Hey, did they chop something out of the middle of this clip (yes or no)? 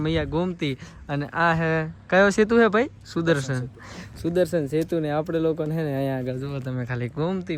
no